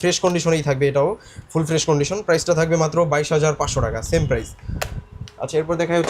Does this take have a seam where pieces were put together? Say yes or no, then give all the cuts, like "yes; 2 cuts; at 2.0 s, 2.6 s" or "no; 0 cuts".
no; 0 cuts